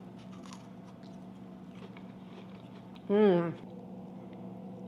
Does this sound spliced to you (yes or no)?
yes